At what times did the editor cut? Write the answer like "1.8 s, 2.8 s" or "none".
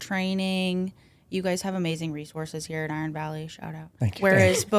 3.9 s